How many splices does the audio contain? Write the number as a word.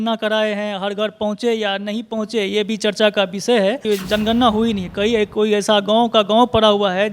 one